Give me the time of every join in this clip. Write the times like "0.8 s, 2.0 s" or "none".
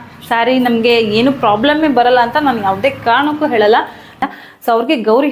4.2 s